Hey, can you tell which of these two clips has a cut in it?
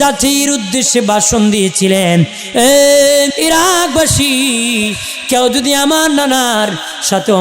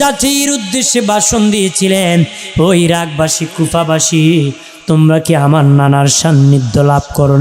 first; 2 cuts; at 2.4 s, 3.3 s

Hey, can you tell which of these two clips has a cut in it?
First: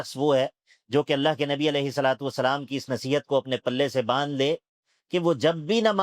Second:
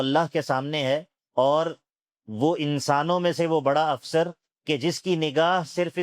second; 2 cuts; at 1.2 s, 4.5 s

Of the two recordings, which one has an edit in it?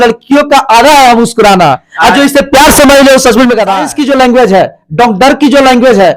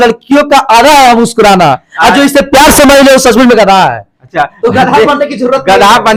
first; 1 cut; at 3.9 s

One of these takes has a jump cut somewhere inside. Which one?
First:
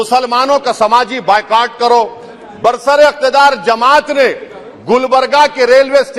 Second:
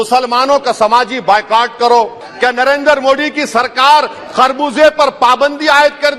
second; 1 cut; at 2.2 s

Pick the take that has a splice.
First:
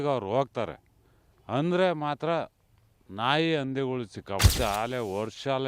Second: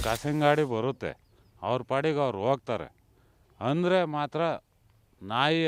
first; 1 cut; at 4.5 s

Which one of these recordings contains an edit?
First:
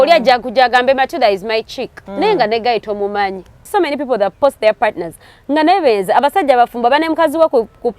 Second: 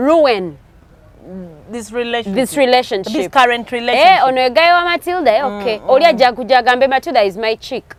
first; 1 cut; at 3.7 s

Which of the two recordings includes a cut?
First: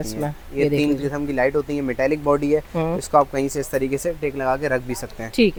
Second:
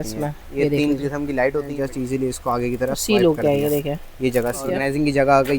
second; 2 cuts; at 1.7 s, 4.7 s

